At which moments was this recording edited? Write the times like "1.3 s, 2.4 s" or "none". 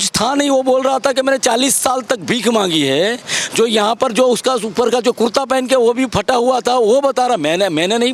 none